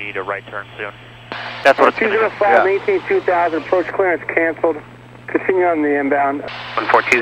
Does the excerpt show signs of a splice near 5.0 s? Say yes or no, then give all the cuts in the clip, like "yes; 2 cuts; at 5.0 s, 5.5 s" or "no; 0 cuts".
no; 2 cuts; at 1.5 s, 6.4 s